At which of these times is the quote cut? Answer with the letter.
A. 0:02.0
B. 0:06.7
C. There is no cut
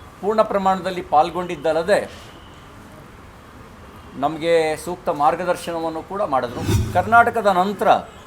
B